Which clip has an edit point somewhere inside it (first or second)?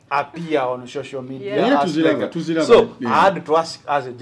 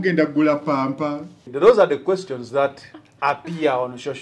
second